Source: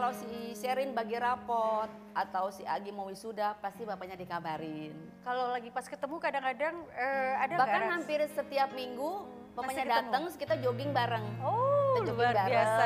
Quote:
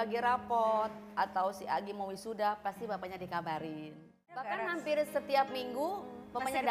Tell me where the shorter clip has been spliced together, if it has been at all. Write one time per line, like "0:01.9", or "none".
0:04.3